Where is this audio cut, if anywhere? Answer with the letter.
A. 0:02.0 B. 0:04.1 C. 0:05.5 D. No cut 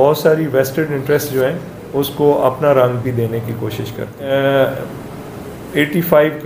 B